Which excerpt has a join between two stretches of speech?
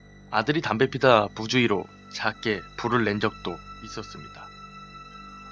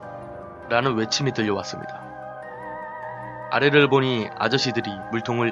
first; 1 cut; at 1.4 s

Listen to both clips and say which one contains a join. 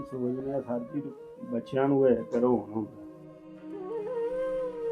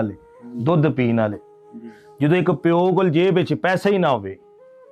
first; 1 cut; at 3.0 s

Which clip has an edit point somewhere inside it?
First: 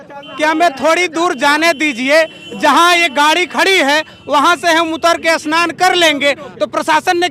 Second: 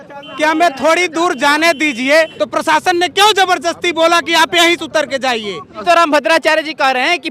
second; 2 cuts; at 2.3 s, 5.8 s

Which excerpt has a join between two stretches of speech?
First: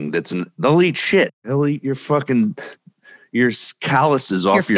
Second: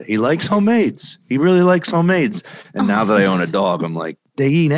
first; 1 cut; at 1.4 s

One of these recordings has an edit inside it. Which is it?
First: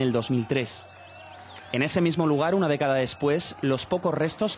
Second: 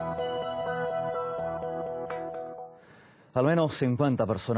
first; 1 cut; at 2.4 s

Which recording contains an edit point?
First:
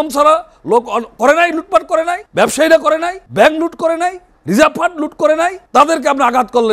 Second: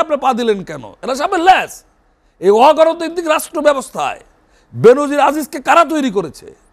first; 4 cuts; at 2.2 s, 3.2 s, 4.3 s, 5.6 s

